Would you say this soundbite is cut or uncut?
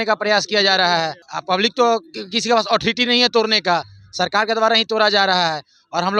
cut